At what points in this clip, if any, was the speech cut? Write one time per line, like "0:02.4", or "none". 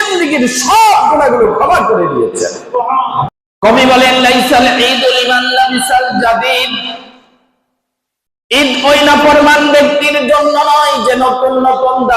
0:03.3